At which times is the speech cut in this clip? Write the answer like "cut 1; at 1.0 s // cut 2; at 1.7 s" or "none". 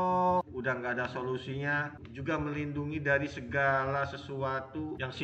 cut 1; at 2.0 s